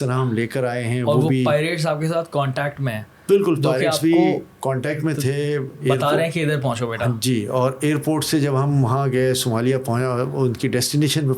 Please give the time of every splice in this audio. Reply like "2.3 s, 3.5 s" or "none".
none